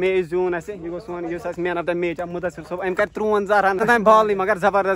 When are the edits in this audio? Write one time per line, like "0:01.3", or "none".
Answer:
0:03.8